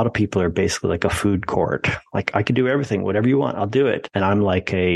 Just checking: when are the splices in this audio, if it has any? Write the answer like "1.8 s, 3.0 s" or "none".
4.1 s